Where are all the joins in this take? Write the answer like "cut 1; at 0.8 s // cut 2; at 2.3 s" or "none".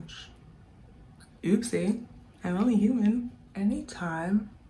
cut 1; at 3.4 s